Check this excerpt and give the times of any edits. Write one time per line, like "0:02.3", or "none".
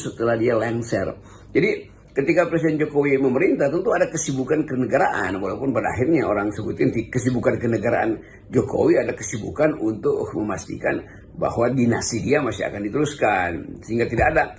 none